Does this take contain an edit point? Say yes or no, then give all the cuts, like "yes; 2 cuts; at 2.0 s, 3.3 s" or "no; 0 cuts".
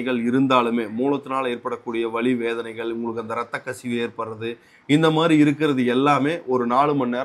no; 0 cuts